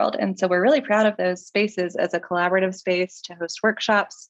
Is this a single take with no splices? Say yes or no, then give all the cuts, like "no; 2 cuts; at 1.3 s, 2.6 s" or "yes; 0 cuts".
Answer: yes; 0 cuts